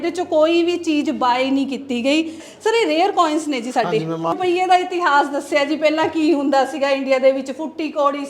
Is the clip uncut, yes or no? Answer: no